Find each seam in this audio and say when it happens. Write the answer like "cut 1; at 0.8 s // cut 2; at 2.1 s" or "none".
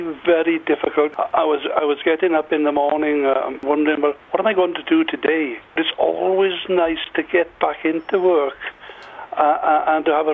cut 1; at 1.1 s // cut 2; at 3.7 s // cut 3; at 5.9 s